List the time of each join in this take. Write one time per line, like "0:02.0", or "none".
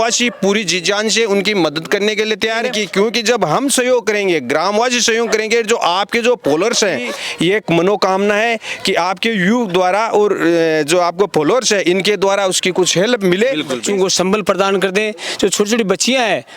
0:02.8
0:07.2
0:13.8